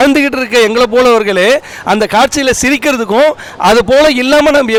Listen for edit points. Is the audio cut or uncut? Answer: uncut